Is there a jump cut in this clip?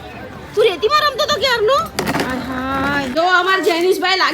yes; 1 cut; at 3.1 s

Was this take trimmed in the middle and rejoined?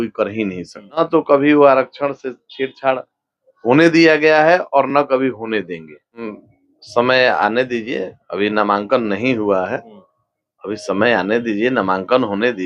yes; 2 cuts; at 1.0 s, 6.3 s

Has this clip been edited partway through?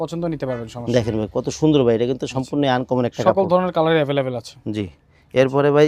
no; 0 cuts

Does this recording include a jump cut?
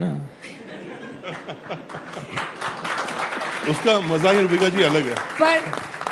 no; 0 cuts

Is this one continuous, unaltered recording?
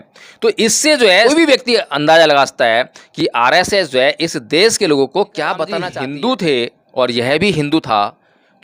no; 2 cuts; at 1.3 s, 5.9 s

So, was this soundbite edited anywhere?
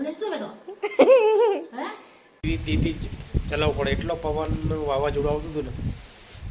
yes; 1 cut; at 2.4 s

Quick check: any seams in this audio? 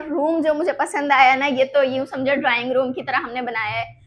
no; 0 cuts

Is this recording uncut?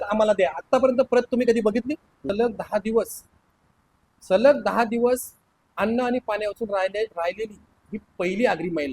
no; 1 cut; at 2.3 s

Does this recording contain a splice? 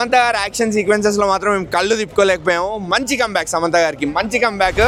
no; 0 cuts

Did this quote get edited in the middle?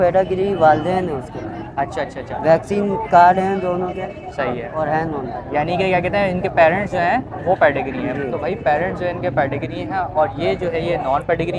no; 0 cuts

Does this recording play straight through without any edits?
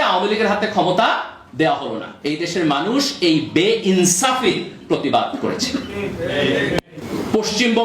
no; 2 cuts; at 2.1 s, 7.0 s

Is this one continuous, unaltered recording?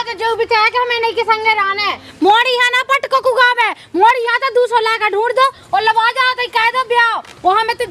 no; 1 cut; at 2.0 s

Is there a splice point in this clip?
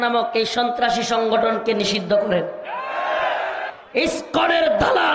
yes; 1 cut; at 3.7 s

